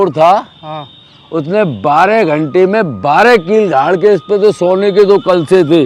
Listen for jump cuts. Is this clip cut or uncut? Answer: uncut